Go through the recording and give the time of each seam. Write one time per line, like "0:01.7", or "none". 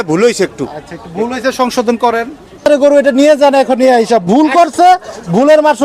0:02.6